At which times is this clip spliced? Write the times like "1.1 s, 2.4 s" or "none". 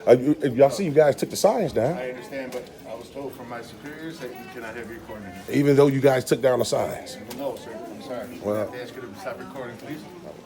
none